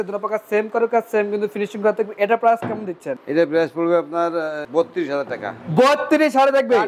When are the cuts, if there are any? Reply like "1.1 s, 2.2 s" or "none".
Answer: none